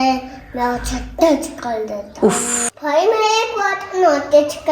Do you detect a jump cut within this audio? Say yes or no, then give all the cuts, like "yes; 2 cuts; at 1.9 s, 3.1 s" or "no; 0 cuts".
yes; 1 cut; at 2.6 s